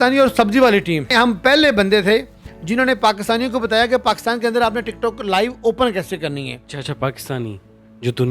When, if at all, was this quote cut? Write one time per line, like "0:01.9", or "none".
0:01.1
0:06.6